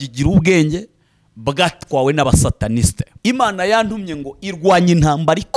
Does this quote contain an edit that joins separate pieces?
yes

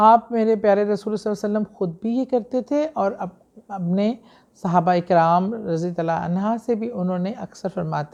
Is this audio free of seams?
yes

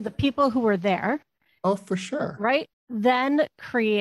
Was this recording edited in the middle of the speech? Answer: yes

